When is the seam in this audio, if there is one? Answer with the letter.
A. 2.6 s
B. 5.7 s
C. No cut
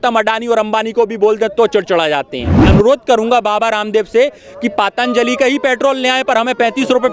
A